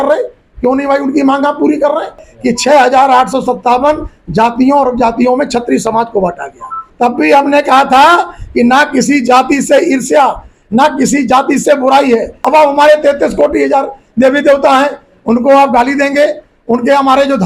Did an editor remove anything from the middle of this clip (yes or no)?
yes